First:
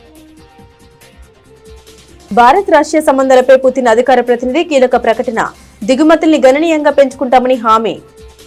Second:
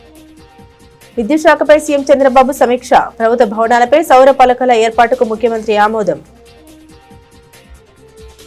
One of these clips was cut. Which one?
first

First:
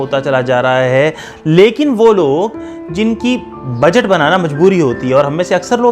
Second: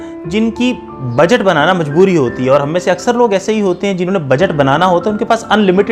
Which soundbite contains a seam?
first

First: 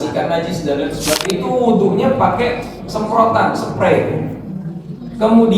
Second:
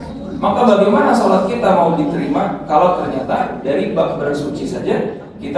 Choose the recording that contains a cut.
first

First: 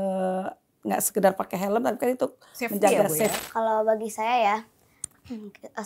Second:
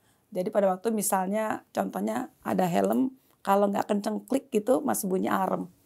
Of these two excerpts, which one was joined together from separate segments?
first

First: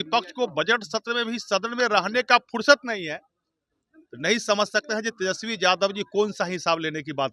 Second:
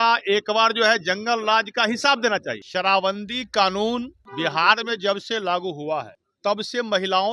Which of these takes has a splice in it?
second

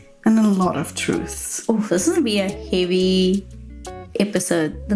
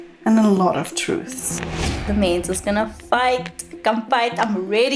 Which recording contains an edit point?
second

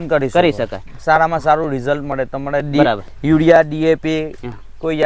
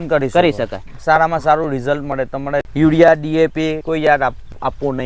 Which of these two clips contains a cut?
second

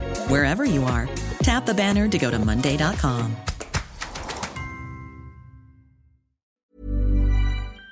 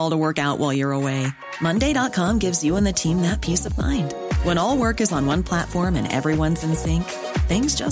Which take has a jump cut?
first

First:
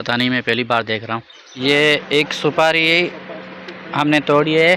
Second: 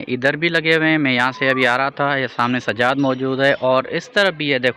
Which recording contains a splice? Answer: first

